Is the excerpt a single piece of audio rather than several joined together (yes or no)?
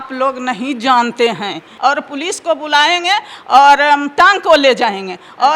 no